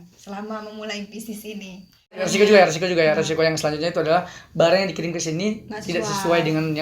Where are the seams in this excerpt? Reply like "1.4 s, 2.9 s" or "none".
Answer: 2.2 s